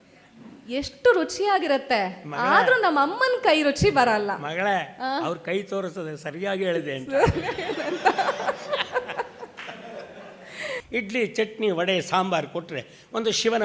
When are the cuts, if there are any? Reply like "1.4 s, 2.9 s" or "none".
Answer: 10.7 s